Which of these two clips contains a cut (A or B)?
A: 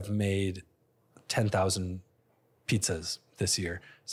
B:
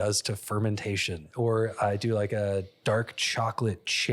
B